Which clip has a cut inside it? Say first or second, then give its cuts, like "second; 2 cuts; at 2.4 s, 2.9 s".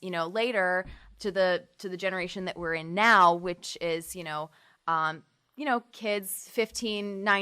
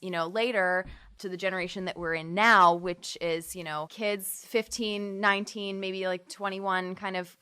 second; 2 cuts; at 1.1 s, 3.9 s